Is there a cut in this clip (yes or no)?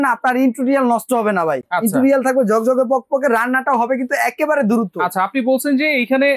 no